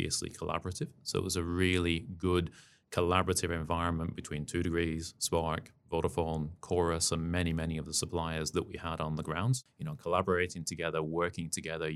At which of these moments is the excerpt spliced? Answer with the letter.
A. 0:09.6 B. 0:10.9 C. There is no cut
A